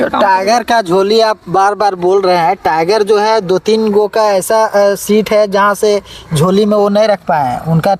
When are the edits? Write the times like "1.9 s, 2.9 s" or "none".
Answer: none